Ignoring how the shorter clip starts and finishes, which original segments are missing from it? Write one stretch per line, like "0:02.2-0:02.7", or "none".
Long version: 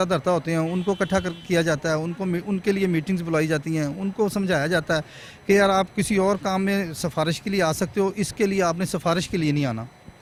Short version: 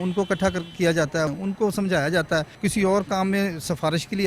0:02.0-0:03.9
0:05.2-0:05.9